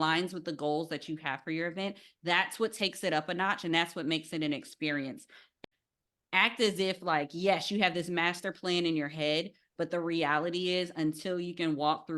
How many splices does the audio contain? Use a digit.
1